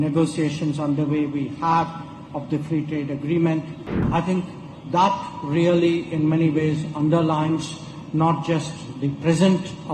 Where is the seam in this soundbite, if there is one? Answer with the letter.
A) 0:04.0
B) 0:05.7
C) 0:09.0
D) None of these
A